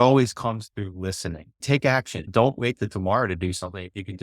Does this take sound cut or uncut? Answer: cut